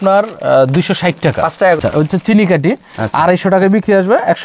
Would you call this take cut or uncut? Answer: cut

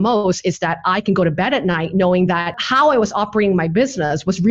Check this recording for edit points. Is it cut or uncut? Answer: cut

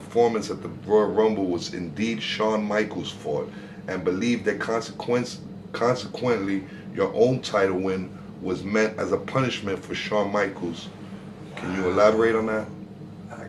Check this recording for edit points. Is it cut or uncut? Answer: uncut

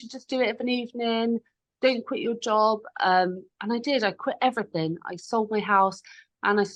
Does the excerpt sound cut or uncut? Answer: uncut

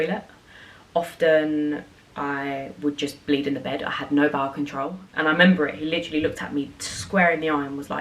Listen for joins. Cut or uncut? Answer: cut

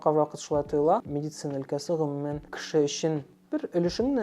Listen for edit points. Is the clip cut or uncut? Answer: cut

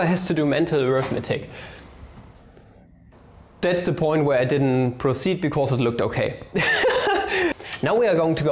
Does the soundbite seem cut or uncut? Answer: cut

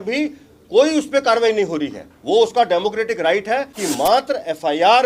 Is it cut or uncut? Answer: cut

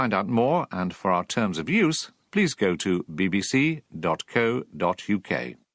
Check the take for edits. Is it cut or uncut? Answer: uncut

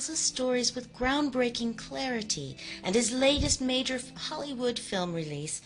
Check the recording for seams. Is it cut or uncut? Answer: cut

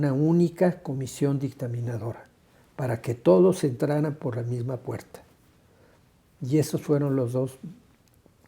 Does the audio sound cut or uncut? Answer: uncut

